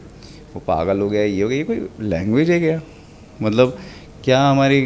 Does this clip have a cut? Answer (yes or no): no